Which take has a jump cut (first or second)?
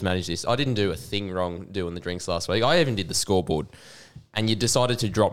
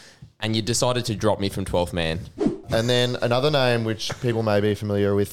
second